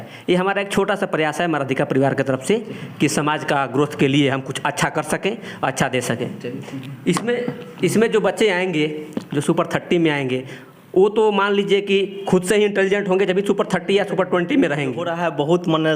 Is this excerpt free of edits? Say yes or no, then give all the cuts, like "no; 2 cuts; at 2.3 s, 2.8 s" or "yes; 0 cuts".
no; 1 cut; at 15.1 s